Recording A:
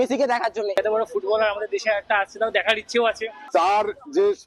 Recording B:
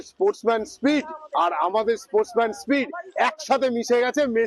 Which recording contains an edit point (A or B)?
A